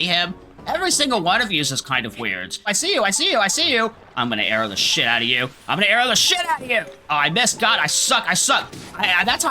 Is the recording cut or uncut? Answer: cut